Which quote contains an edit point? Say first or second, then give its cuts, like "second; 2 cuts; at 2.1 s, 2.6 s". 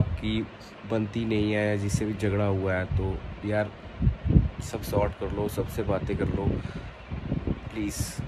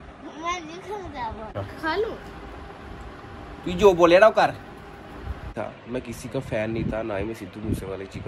second; 2 cuts; at 1.6 s, 5.5 s